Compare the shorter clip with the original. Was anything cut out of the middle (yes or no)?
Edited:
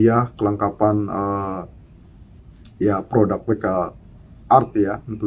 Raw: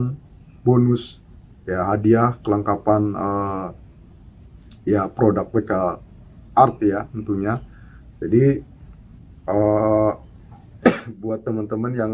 no